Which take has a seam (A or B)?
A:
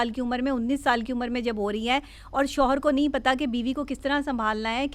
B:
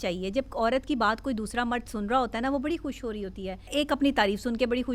B